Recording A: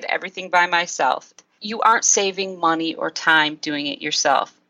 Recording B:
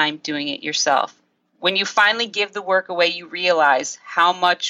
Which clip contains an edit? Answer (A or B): A